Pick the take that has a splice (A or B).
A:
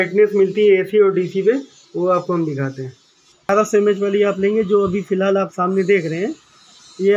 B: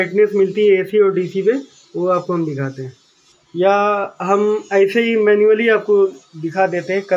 A